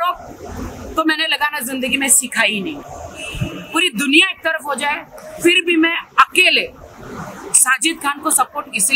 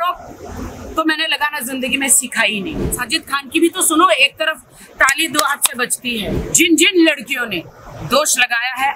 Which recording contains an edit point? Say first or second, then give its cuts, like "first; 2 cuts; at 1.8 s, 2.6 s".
second; 2 cuts; at 2.9 s, 6.4 s